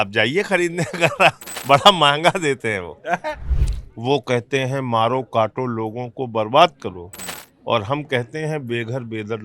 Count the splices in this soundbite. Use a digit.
1